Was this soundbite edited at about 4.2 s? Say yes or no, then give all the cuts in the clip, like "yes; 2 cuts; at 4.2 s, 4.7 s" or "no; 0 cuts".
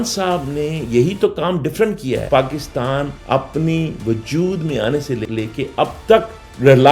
no; 1 cut; at 2.3 s